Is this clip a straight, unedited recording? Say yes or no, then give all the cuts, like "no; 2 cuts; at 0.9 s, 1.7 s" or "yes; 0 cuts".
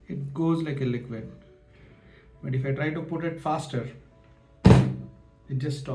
yes; 0 cuts